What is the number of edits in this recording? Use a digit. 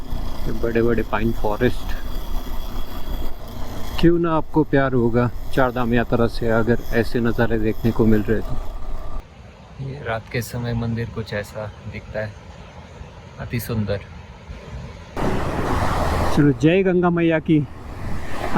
3